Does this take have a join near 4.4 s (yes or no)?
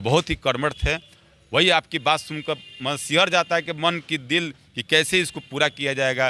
no